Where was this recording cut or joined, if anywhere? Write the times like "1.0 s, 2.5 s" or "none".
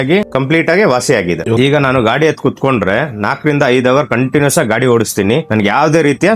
1.5 s